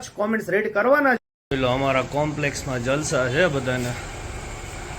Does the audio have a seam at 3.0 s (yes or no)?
no